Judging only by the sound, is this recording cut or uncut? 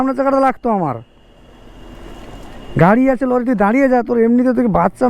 uncut